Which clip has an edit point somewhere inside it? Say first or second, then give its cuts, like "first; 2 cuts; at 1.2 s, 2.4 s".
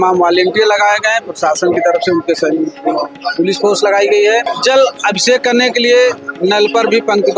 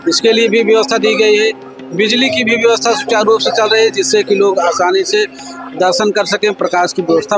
first; 1 cut; at 4.5 s